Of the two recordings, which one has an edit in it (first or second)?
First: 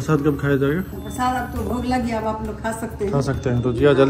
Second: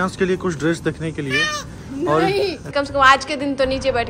second